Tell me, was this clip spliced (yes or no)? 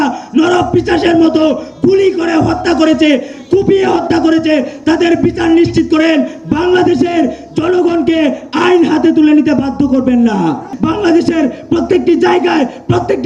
yes